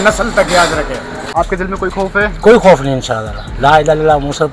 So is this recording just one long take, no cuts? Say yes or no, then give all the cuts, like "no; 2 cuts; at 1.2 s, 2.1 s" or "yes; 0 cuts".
no; 1 cut; at 1.2 s